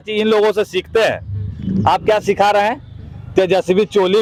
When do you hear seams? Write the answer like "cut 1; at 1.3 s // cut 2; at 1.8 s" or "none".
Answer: none